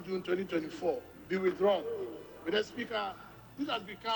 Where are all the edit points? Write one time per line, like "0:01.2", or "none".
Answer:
0:01.1
0:02.3